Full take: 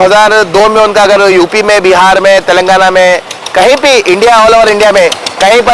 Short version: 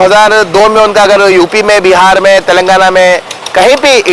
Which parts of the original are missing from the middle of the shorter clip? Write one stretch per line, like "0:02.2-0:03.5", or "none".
none